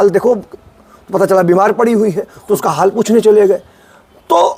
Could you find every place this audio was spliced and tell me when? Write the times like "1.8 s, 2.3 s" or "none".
none